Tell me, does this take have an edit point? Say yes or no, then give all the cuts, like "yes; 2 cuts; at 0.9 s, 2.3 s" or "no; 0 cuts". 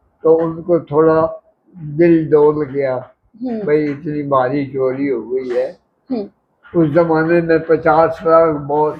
no; 0 cuts